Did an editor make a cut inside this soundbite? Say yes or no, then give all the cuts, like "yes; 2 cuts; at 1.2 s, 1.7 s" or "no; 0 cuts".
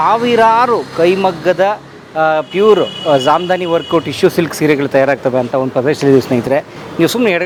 no; 0 cuts